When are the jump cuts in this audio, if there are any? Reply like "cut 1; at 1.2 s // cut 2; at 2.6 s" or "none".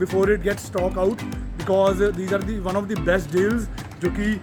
none